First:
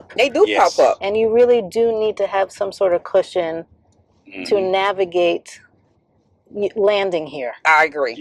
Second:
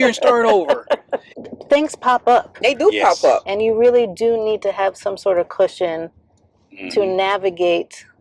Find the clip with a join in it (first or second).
second